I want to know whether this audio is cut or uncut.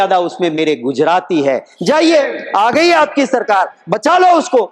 uncut